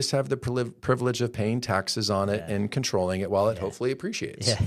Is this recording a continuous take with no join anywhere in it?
yes; 0 cuts

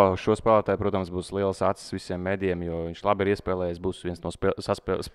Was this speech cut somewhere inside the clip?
no; 0 cuts

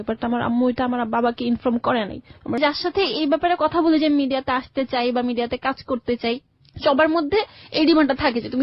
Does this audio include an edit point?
yes; 1 cut; at 2.6 s

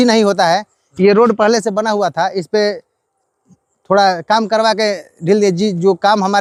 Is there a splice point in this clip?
no; 0 cuts

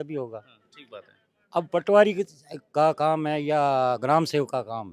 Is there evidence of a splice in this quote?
no; 0 cuts

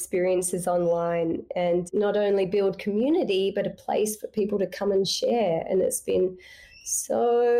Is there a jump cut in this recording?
yes; 1 cut; at 1.9 s

